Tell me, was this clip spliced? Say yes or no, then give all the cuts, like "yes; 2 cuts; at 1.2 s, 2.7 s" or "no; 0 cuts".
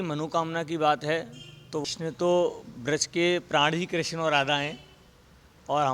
yes; 1 cut; at 1.8 s